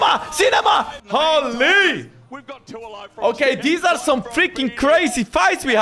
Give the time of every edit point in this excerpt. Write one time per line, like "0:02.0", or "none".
0:01.0